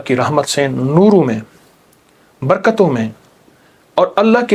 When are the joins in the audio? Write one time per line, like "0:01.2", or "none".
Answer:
none